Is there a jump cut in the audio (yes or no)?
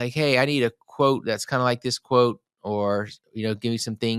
no